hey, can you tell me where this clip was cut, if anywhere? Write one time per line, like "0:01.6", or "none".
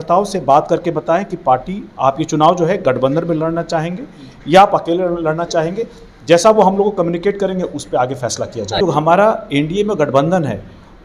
0:08.8